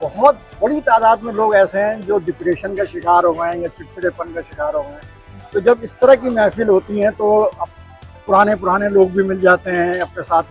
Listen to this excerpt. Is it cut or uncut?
uncut